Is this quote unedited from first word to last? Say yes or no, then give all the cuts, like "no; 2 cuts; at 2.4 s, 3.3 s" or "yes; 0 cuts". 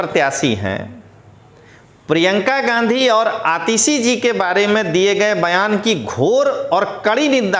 yes; 0 cuts